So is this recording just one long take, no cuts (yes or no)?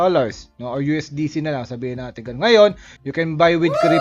no